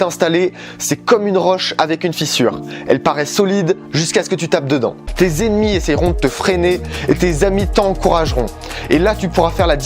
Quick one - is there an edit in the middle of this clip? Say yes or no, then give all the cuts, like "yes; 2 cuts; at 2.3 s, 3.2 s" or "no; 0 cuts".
yes; 1 cut; at 5.0 s